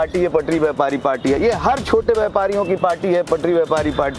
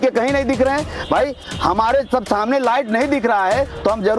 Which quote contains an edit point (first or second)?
second